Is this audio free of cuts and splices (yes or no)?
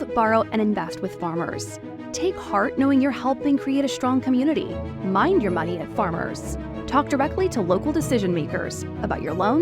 yes